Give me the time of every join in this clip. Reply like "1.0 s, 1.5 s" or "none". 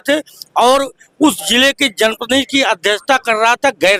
none